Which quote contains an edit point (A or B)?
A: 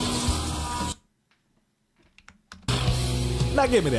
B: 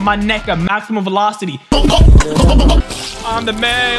B